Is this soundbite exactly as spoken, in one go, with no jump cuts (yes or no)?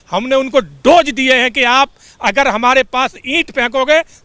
yes